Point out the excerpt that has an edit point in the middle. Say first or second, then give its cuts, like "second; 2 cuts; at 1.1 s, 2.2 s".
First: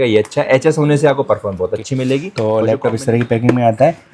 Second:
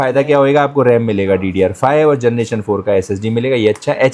first; 1 cut; at 2.3 s